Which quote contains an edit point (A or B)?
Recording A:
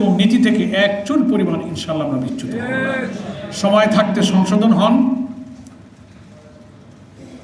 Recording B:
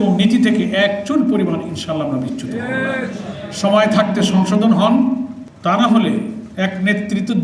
B